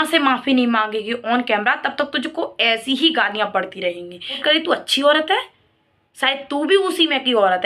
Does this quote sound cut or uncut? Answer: cut